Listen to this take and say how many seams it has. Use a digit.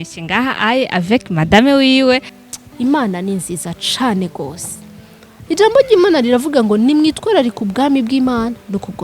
1